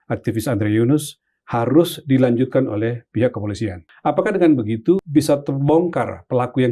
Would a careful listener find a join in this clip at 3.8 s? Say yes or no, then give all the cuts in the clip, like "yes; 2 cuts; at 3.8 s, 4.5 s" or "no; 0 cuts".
yes; 2 cuts; at 3.8 s, 5.0 s